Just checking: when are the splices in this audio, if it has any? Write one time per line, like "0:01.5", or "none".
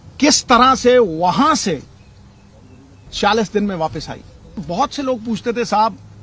0:04.6